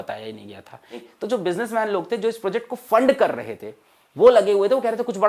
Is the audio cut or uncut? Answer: cut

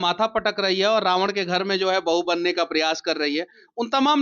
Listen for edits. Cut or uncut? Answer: uncut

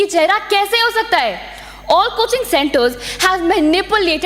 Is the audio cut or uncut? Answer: uncut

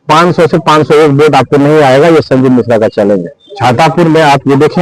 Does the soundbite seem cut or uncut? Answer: cut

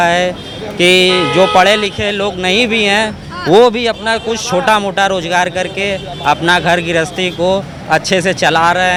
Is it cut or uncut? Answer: uncut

